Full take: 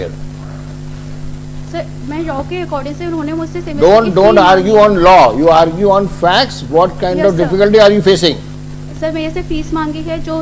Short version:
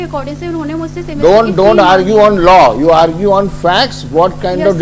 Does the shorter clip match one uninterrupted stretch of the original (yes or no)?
yes